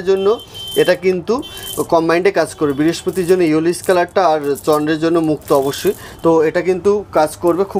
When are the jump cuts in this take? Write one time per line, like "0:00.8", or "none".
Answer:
none